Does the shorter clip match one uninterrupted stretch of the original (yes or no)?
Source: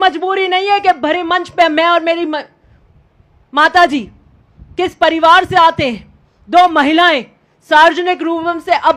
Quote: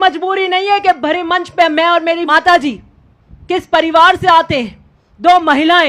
no